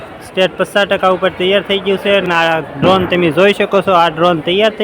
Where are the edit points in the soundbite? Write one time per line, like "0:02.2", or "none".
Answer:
0:02.3